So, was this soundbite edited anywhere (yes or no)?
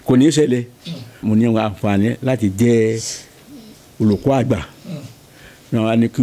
yes